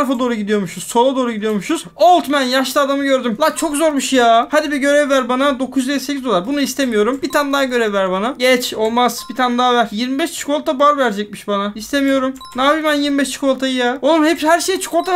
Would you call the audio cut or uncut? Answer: uncut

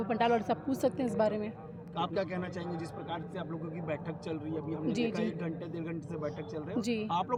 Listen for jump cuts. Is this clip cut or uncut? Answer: uncut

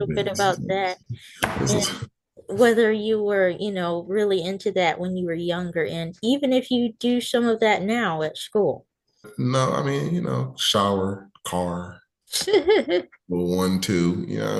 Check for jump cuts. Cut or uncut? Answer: cut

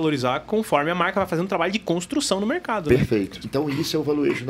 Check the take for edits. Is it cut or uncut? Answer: cut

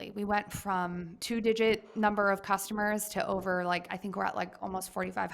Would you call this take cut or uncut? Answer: cut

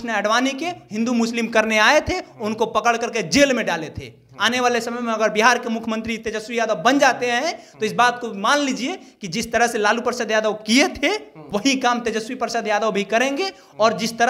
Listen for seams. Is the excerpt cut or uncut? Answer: cut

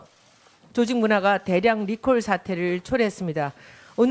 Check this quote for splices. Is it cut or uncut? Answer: uncut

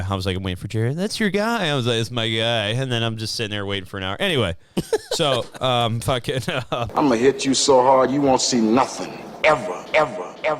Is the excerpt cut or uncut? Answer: cut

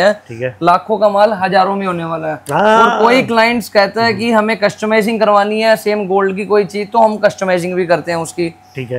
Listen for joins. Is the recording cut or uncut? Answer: uncut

